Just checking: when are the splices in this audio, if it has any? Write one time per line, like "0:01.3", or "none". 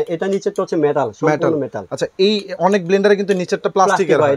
none